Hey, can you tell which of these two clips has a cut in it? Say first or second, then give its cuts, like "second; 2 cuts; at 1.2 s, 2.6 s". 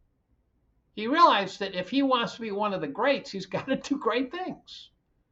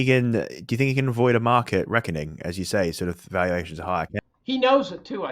second; 1 cut; at 4.2 s